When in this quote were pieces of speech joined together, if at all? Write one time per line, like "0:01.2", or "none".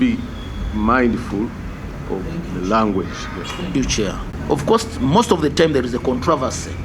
0:04.2